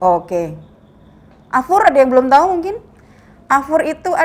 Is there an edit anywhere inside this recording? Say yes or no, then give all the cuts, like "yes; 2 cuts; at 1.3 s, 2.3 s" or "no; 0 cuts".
no; 0 cuts